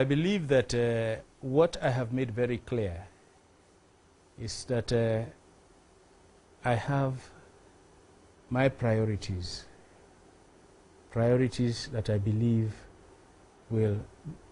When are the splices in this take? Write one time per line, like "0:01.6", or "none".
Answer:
0:10.1